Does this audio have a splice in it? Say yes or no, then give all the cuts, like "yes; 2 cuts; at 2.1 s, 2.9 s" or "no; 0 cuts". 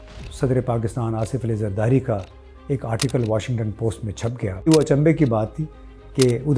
yes; 1 cut; at 4.7 s